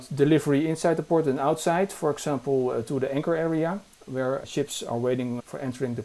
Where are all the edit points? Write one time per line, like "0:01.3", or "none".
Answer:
none